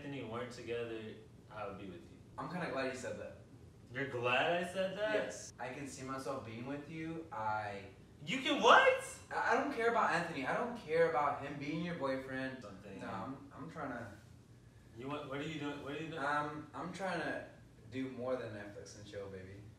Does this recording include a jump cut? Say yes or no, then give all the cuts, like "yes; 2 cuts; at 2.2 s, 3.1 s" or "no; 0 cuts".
yes; 3 cuts; at 2.3 s, 5.4 s, 12.7 s